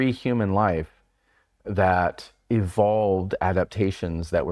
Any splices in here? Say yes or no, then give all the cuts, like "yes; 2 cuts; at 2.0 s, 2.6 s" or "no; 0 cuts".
no; 0 cuts